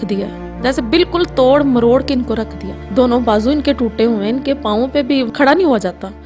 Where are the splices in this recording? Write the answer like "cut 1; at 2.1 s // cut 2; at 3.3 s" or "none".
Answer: cut 1; at 5.3 s